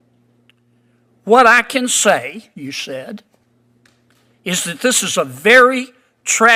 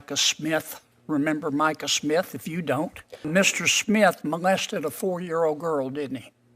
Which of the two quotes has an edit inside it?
second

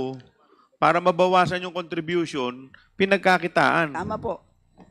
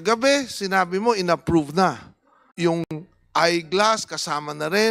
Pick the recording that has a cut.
second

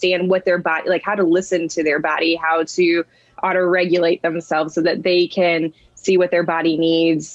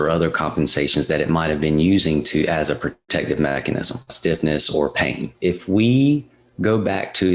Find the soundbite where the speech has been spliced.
second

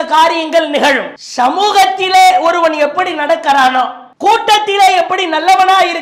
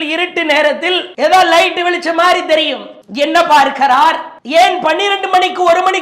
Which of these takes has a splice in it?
second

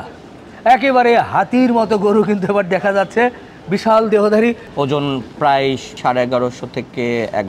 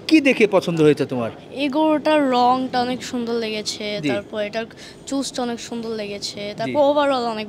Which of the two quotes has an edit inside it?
first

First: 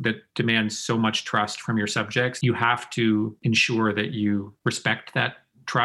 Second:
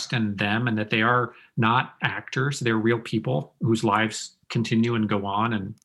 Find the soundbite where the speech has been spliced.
first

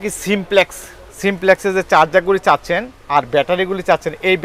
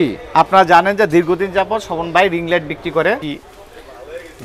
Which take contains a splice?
second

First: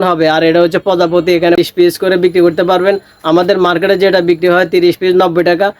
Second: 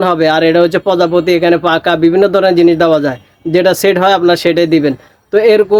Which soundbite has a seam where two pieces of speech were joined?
first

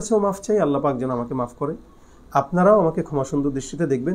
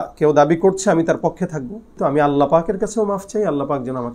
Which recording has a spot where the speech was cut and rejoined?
second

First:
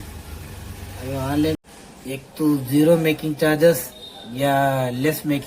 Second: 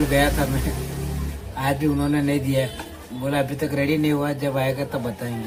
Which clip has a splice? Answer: first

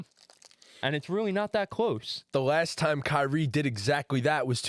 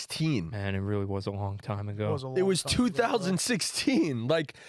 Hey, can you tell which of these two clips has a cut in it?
first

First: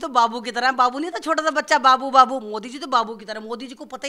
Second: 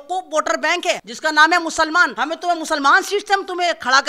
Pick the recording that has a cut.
second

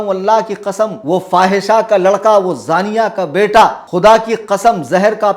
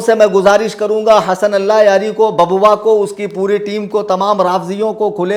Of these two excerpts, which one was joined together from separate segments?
first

